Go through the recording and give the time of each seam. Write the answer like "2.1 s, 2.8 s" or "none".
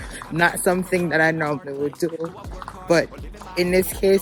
none

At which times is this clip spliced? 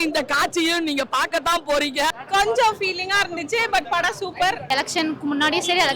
2.2 s, 4.6 s

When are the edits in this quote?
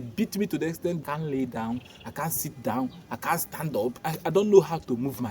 1.0 s, 4.1 s

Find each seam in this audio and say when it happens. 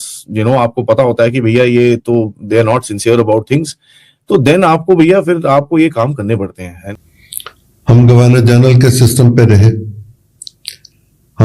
6.8 s

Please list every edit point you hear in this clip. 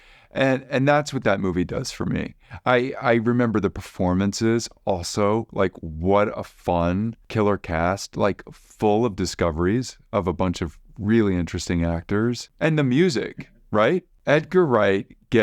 7.2 s, 12.5 s, 14.1 s

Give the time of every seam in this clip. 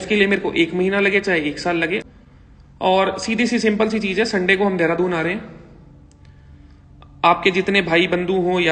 2.0 s

